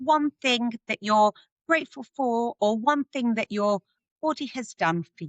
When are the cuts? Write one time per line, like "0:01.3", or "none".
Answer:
none